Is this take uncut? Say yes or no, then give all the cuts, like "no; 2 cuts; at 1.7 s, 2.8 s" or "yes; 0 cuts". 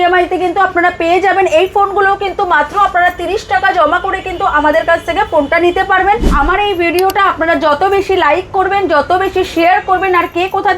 no; 1 cut; at 6.3 s